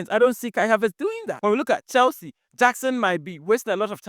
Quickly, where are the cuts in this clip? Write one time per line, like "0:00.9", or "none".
0:01.3

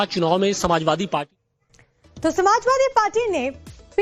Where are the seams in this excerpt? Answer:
0:01.2

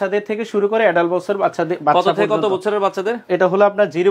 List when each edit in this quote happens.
none

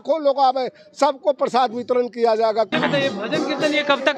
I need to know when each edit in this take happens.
0:02.7

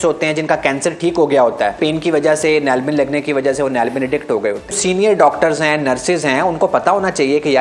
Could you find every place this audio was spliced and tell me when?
0:01.8
0:04.8

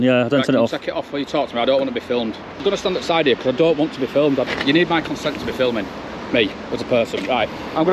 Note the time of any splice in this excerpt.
0:02.6
0:04.5

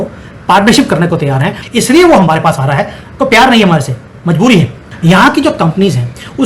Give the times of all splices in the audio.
0:01.5
0:04.8

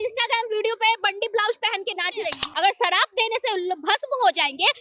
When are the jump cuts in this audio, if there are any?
0:02.4

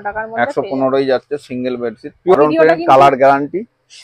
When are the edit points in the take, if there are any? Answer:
0:02.4

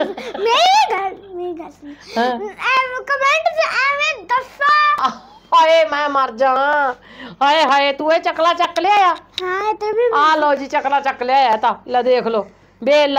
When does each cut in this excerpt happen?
0:05.0

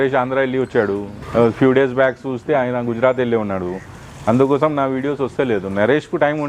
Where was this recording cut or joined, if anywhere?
0:01.1

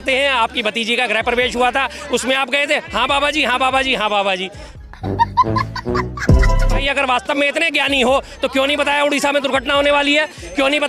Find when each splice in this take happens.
0:06.7

